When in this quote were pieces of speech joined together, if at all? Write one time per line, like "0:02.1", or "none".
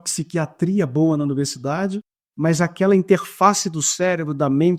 none